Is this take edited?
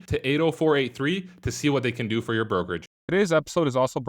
yes; 1 cut; at 2.9 s

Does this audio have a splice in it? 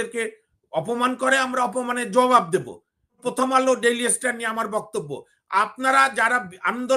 yes; 1 cut; at 3.2 s

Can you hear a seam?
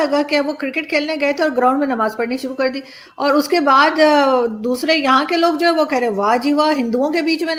no; 0 cuts

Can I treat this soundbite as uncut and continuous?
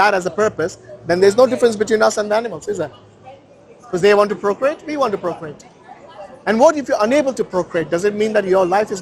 yes; 0 cuts

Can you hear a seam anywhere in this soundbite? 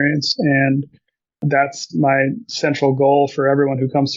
yes; 1 cut; at 1.4 s

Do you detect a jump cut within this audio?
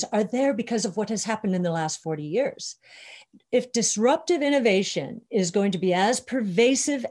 yes; 1 cut; at 3.3 s

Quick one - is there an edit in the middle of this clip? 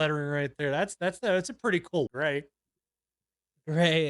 yes; 1 cut; at 2.1 s

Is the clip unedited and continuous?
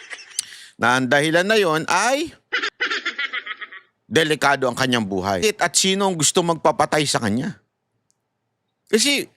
no; 1 cut; at 5.4 s

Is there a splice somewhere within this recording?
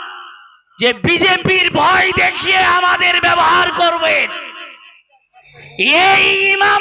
no; 0 cuts

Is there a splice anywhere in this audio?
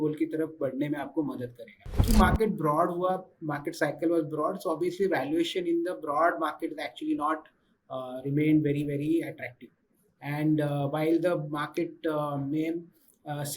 yes; 1 cut; at 2.0 s

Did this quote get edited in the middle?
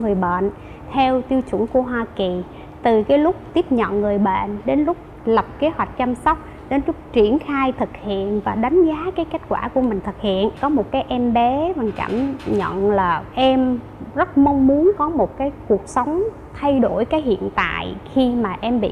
yes; 2 cuts; at 3.4 s, 10.6 s

